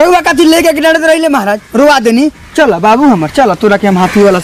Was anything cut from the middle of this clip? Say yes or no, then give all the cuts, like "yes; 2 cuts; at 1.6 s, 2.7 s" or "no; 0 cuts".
no; 0 cuts